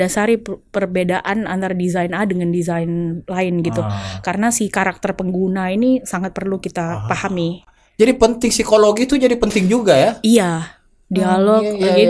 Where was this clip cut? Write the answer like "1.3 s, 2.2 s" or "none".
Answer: none